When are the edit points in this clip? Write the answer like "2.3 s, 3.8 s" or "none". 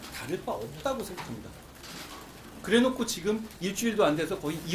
2.5 s